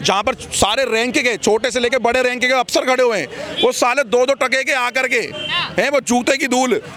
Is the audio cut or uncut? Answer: uncut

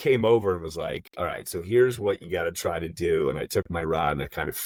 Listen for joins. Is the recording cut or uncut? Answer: uncut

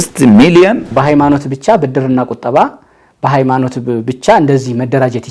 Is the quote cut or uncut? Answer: cut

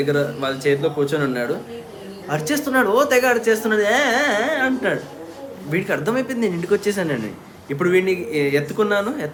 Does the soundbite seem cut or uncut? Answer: uncut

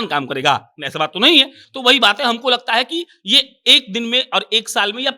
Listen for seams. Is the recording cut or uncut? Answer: uncut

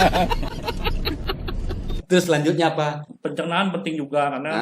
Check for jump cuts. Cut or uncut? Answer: cut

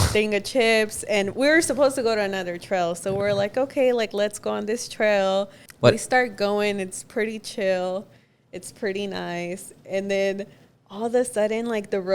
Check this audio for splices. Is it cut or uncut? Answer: cut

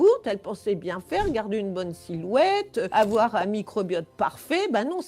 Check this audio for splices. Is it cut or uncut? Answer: cut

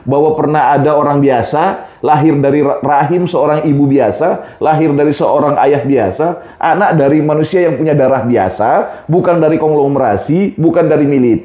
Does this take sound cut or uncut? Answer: uncut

